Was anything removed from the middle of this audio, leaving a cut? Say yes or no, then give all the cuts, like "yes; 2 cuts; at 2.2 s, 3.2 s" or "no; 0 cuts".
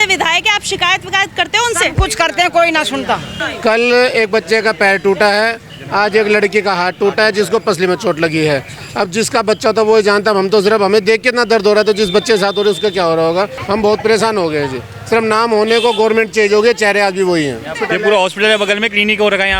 yes; 3 cuts; at 3.4 s, 13.6 s, 17.7 s